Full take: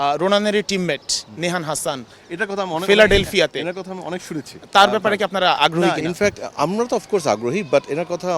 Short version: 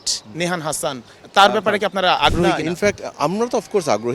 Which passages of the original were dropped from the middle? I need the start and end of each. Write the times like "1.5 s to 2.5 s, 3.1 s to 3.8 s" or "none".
2.2 s to 4.5 s